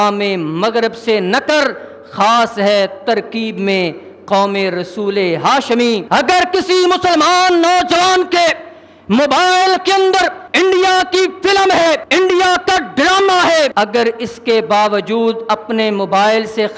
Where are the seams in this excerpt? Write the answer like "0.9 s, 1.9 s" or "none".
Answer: 6.0 s, 10.4 s, 12.0 s, 13.7 s